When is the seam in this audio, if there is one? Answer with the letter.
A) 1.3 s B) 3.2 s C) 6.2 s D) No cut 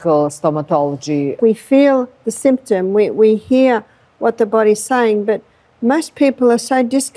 A